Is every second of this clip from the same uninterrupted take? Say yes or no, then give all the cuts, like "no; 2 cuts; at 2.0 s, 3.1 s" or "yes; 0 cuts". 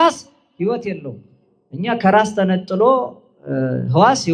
yes; 0 cuts